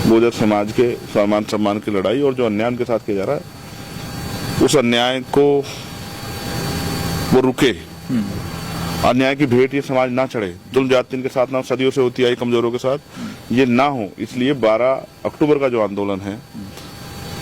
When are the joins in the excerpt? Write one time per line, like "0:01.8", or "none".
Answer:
none